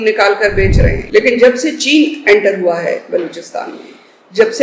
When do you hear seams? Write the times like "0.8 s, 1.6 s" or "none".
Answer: 1.0 s